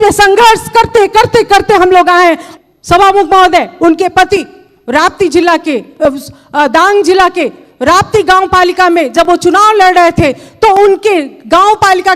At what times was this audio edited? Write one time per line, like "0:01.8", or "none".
0:02.5